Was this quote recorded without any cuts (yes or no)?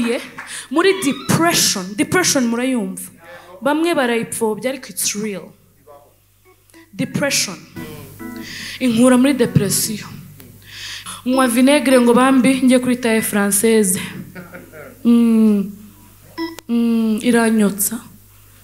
no